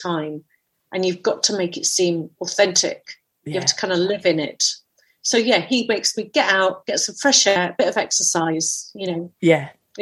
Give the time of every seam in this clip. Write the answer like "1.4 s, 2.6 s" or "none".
4.8 s, 7.6 s

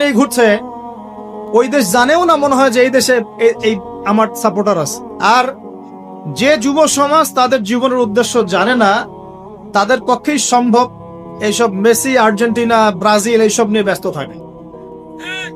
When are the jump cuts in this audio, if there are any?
5.0 s

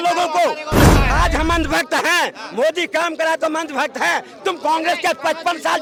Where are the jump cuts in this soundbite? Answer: none

